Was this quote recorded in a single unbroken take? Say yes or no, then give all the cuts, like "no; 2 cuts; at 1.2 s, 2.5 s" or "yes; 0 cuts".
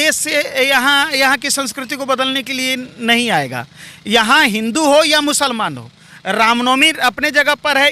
yes; 0 cuts